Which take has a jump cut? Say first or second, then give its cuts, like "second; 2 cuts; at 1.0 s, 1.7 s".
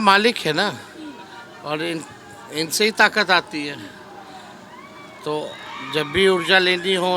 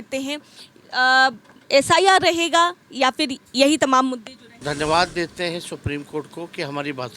second; 1 cut; at 4.6 s